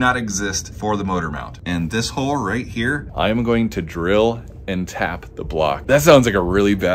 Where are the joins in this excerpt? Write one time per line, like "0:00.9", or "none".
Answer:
0:01.5
0:03.1
0:05.8